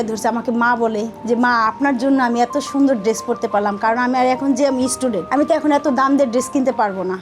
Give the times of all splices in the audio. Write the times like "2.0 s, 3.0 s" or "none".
none